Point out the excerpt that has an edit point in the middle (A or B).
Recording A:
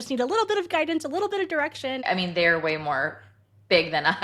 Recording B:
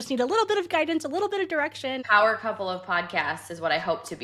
A